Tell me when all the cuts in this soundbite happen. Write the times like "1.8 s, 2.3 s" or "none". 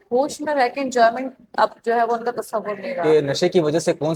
3.0 s